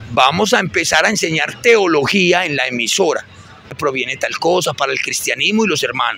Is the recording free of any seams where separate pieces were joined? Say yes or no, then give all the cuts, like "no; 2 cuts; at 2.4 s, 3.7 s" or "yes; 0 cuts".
no; 1 cut; at 3.8 s